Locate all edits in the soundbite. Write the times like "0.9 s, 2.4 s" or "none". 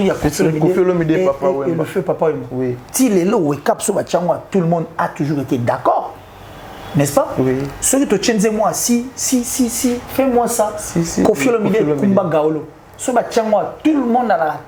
none